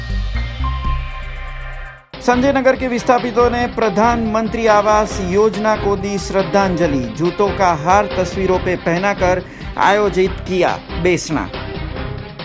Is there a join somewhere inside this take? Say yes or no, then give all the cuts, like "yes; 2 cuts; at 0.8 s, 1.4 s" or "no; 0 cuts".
yes; 1 cut; at 1.7 s